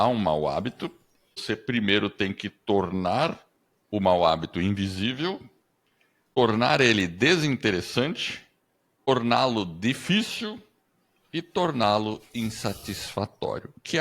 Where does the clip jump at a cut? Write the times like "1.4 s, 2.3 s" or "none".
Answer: 1.4 s, 6.4 s, 9.1 s